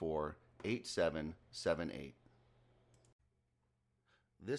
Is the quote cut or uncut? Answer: cut